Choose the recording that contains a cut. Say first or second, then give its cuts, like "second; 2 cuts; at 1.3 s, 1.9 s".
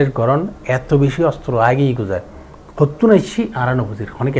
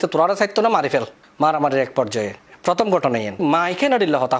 second; 2 cuts; at 1.2 s, 3.4 s